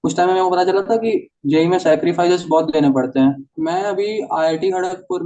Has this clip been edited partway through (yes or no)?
yes